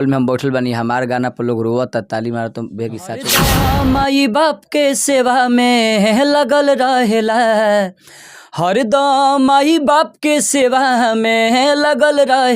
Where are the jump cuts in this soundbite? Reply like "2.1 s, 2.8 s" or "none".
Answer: 3.6 s